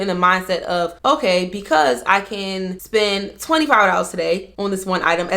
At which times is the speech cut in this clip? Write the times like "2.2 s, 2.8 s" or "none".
0.9 s, 2.8 s, 4.5 s